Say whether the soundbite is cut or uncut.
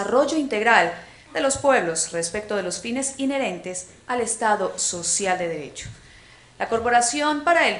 cut